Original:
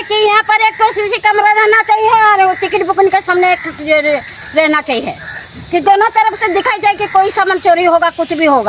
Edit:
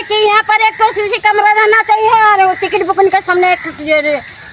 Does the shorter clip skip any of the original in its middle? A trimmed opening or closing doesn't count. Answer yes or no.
no